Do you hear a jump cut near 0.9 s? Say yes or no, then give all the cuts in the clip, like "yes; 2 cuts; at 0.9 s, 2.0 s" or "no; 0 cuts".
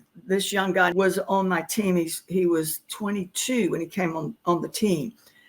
yes; 1 cut; at 0.9 s